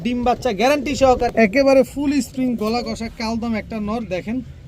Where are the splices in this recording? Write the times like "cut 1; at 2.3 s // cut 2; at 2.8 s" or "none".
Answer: cut 1; at 1.3 s